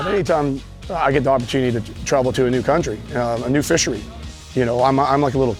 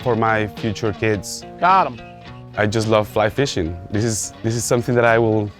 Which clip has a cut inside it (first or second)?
second